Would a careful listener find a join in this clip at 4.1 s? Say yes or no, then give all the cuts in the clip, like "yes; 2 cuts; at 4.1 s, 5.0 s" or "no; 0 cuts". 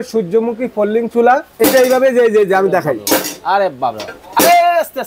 no; 1 cut; at 1.5 s